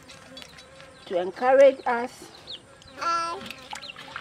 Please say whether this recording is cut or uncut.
uncut